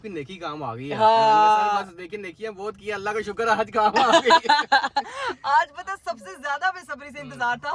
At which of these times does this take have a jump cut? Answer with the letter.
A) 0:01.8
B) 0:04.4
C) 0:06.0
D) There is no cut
D